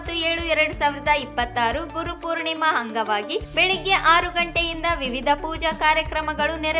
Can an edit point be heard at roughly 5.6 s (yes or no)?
no